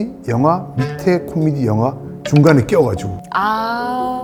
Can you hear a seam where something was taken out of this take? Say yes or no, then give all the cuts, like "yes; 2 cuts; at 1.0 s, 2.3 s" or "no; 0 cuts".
no; 0 cuts